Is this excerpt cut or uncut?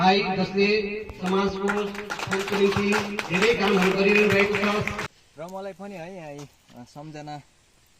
cut